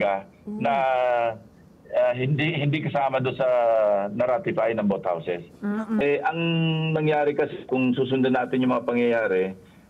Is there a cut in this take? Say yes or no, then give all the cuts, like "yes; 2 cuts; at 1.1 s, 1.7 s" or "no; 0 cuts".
yes; 1 cut; at 6.0 s